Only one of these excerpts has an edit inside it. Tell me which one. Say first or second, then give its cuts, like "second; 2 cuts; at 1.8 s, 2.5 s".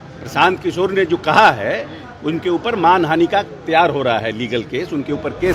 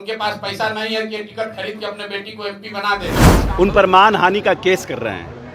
second; 1 cut; at 3.4 s